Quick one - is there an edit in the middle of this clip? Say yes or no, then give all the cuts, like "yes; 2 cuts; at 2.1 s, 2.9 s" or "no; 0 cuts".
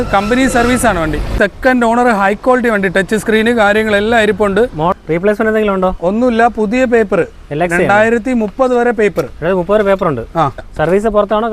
yes; 3 cuts; at 1.3 s, 4.9 s, 10.7 s